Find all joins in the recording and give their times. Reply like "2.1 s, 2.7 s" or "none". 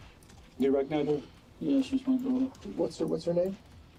none